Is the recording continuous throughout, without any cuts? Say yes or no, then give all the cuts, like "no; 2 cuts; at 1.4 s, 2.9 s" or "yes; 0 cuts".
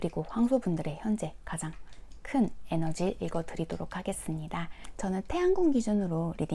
no; 1 cut; at 4.9 s